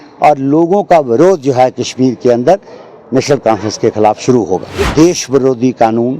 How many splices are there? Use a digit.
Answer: 1